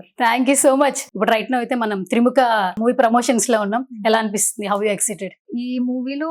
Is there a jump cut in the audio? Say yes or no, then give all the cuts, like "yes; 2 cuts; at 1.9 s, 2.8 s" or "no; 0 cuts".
yes; 3 cuts; at 1.1 s, 2.8 s, 5.4 s